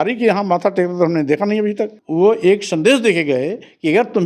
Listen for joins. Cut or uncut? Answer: cut